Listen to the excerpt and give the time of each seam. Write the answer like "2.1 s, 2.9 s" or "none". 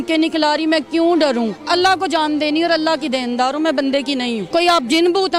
1.6 s, 4.4 s